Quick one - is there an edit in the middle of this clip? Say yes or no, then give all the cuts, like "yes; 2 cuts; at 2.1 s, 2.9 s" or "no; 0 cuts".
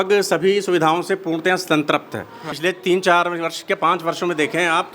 yes; 1 cut; at 2.5 s